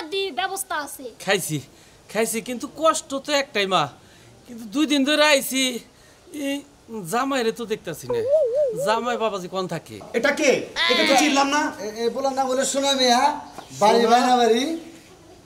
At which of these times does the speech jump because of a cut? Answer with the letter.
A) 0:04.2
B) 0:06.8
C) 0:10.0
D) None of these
C